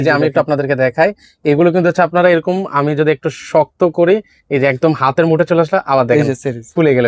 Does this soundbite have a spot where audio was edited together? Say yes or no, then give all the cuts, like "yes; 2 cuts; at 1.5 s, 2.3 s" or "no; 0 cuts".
no; 0 cuts